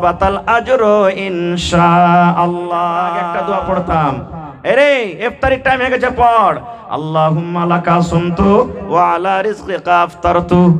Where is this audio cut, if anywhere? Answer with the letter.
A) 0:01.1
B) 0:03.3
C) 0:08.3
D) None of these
B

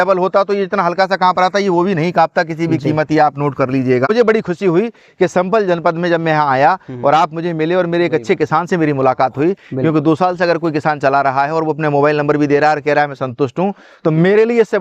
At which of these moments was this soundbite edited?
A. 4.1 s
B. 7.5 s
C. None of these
A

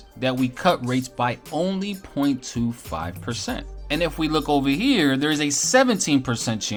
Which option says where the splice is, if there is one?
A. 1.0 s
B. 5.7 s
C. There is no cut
C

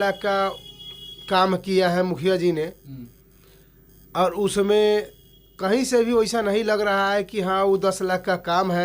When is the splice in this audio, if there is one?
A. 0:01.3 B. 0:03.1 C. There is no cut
C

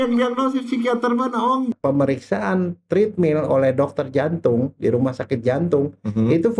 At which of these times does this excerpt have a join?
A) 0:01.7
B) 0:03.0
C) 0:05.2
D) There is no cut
A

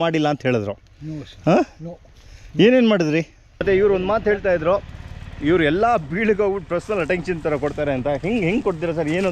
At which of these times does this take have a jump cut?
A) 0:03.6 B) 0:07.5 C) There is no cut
A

